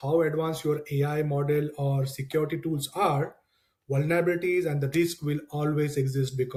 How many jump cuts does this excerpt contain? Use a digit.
0